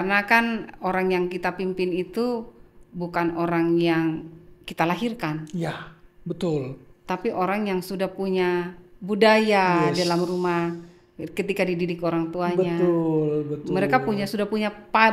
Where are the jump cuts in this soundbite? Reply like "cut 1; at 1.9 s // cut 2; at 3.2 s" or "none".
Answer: none